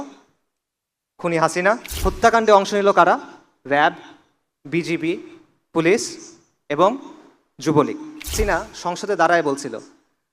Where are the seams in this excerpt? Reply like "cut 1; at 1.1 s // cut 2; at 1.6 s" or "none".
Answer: cut 1; at 1.9 s // cut 2; at 8.3 s